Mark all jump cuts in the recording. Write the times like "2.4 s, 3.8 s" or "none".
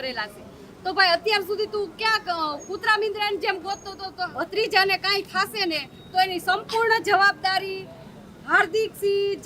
4.3 s